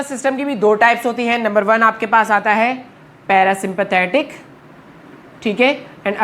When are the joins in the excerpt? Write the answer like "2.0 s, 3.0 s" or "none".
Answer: none

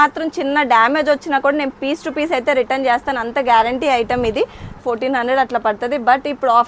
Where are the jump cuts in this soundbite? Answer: 4.8 s

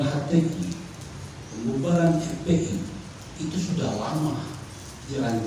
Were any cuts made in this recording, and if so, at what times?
none

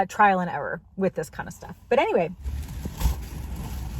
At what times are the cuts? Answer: 2.4 s

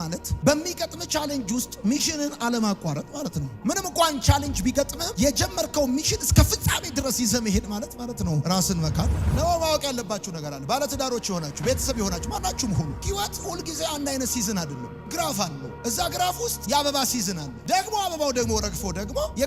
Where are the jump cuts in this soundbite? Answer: 9.1 s

